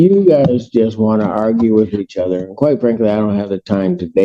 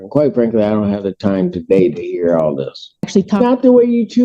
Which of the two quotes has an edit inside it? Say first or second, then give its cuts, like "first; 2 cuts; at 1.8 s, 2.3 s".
second; 1 cut; at 2.9 s